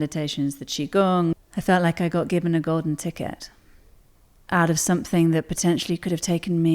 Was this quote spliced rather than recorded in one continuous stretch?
yes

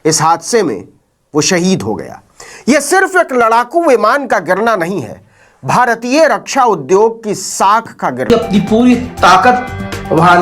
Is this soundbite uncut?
no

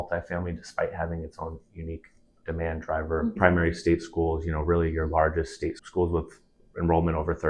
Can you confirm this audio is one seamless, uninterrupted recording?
no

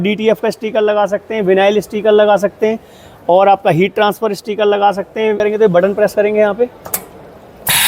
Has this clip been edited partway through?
yes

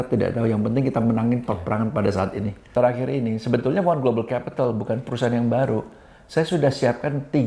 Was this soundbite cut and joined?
yes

